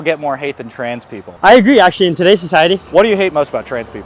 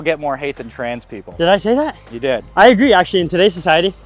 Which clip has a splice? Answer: first; 2 cuts; at 1.3 s, 2.8 s

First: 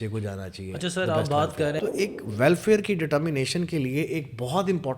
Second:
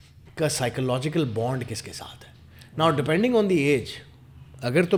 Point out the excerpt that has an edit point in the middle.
first; 1 cut; at 1.8 s

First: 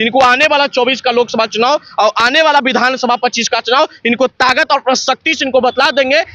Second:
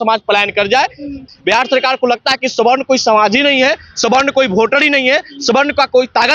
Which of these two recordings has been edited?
second; 1 cut; at 1.3 s

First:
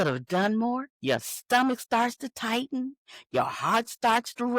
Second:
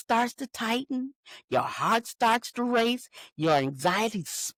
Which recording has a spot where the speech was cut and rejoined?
first; 1 cut; at 0.9 s

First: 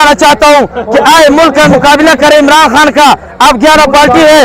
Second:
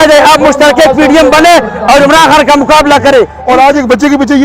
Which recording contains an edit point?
second; 1 cut; at 3.4 s

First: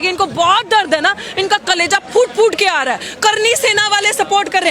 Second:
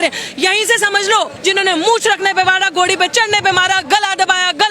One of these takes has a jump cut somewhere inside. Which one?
second; 1 cut; at 1.3 s

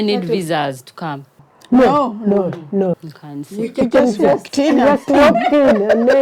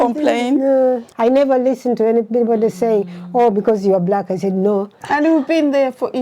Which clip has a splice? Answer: second; 2 cuts; at 1.1 s, 5.0 s

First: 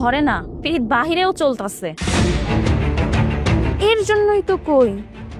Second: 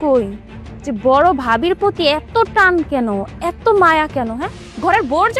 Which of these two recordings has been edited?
first; 2 cuts; at 1.9 s, 3.7 s

